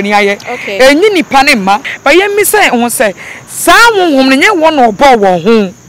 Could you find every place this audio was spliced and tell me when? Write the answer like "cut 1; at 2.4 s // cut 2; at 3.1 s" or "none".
cut 1; at 1.9 s

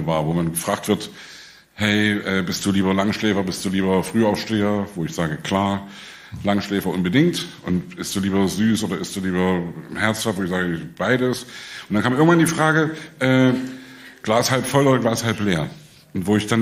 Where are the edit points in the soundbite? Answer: none

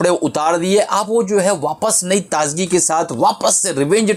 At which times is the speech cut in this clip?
none

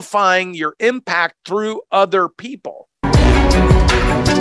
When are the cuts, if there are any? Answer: cut 1; at 3.1 s

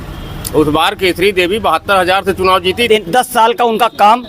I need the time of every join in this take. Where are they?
cut 1; at 2.9 s

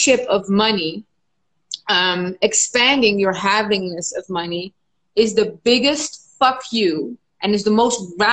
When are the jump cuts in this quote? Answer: none

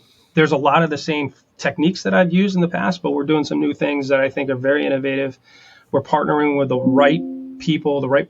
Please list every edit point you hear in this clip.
cut 1; at 1.5 s

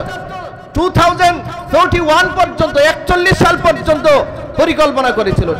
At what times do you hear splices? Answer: cut 1; at 1.6 s

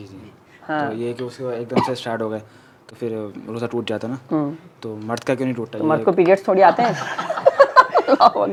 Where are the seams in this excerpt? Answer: none

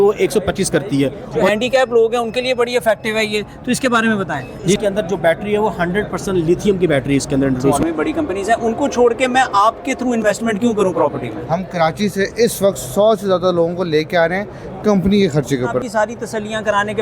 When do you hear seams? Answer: cut 1; at 1.5 s // cut 2; at 4.8 s // cut 3; at 7.8 s // cut 4; at 11.3 s // cut 5; at 15.8 s

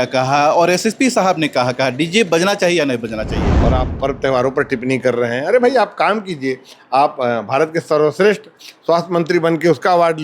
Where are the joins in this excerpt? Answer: cut 1; at 3.4 s

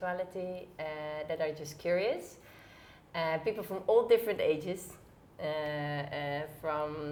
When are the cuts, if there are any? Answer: none

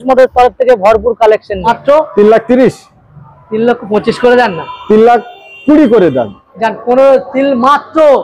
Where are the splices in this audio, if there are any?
cut 1; at 1.7 s

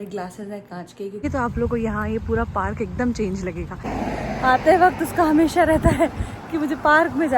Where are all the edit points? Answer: cut 1; at 1.2 s // cut 2; at 3.8 s

